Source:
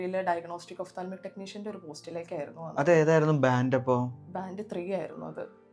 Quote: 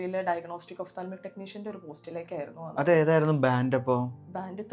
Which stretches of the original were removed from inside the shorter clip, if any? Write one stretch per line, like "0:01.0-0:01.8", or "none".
none